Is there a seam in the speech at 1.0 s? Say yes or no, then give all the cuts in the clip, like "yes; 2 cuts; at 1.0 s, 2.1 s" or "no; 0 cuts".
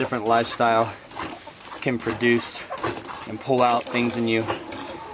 no; 0 cuts